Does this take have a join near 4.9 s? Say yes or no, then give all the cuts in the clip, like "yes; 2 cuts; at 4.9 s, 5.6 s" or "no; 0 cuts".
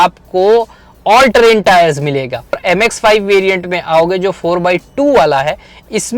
no; 1 cut; at 2.6 s